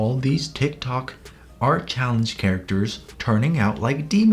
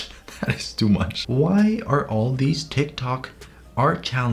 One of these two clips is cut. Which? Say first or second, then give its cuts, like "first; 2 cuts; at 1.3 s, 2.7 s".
second; 1 cut; at 1.2 s